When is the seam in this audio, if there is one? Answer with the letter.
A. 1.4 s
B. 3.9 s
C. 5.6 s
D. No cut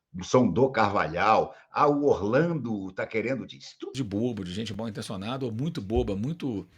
B